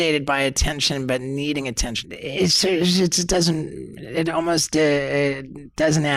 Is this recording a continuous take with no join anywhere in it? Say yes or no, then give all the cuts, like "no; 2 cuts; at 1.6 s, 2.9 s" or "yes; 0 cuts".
no; 1 cut; at 2.0 s